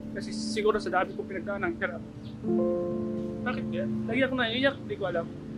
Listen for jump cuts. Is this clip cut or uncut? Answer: uncut